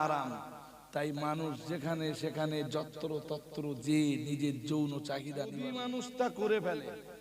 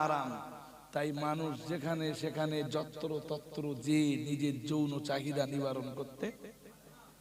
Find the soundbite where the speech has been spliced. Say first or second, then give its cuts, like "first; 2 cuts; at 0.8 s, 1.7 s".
first; 1 cut; at 5.5 s